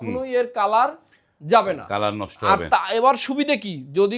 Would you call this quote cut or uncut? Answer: uncut